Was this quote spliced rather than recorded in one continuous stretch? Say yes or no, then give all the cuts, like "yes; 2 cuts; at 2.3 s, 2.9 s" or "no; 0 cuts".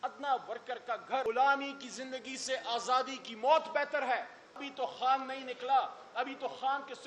yes; 2 cuts; at 1.2 s, 4.6 s